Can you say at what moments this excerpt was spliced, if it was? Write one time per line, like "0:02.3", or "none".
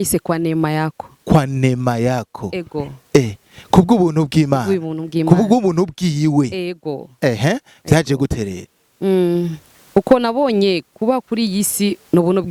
none